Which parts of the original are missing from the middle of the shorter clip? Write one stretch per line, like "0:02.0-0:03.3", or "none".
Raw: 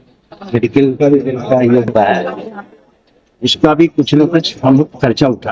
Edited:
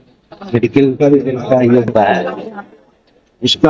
none